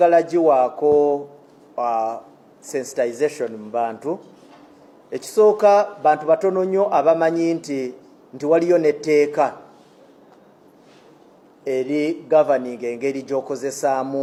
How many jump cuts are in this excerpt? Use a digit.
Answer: 0